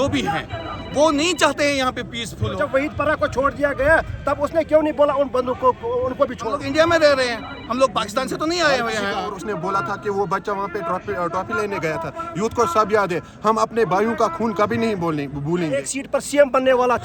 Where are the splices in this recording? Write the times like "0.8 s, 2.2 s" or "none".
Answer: 2.5 s, 6.5 s, 9.3 s, 15.8 s